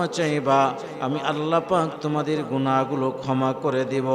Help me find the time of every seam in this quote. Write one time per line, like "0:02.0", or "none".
none

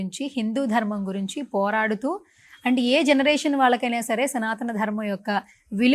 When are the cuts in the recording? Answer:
none

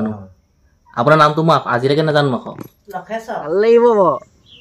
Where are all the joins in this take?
0:03.4

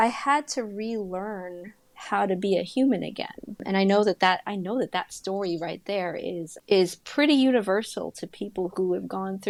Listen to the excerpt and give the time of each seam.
none

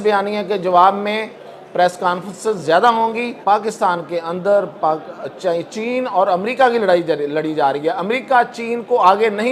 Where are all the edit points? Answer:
0:03.4

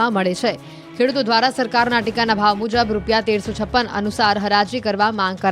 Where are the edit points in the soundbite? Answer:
0:02.6

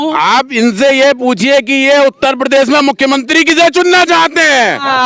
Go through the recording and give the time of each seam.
none

